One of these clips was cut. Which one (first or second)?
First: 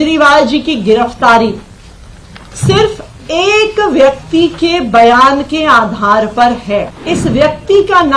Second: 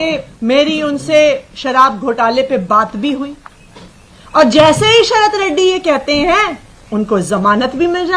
first